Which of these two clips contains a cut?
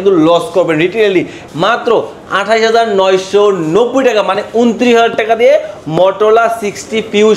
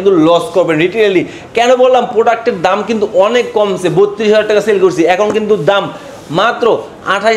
first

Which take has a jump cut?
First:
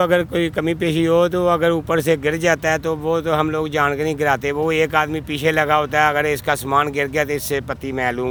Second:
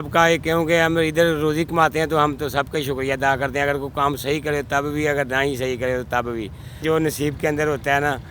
second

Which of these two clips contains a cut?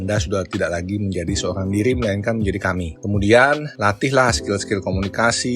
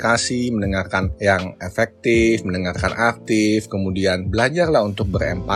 first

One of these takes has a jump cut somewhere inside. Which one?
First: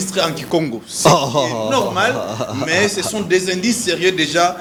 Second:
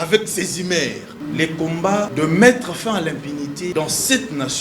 second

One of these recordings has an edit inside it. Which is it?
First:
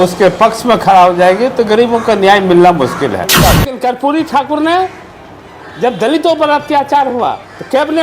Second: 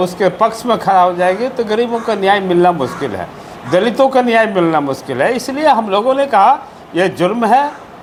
first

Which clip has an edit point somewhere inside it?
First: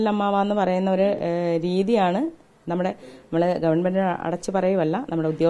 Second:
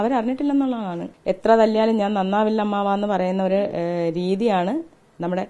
second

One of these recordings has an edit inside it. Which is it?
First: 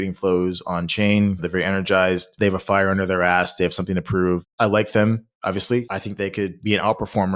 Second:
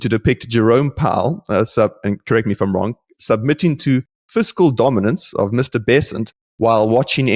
first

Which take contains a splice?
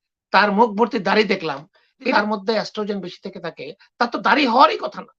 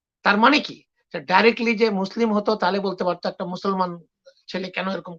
first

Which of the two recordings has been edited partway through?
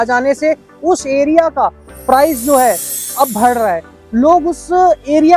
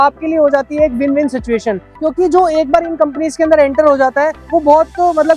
second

